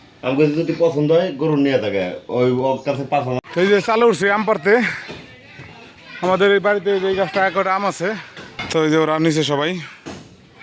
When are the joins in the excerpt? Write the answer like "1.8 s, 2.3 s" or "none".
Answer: 3.4 s, 8.6 s